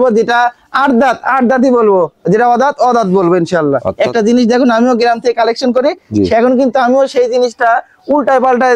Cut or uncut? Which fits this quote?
cut